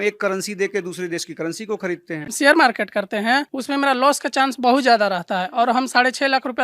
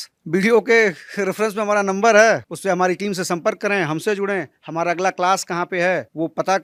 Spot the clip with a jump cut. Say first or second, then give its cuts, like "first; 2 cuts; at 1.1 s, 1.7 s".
first; 1 cut; at 2.3 s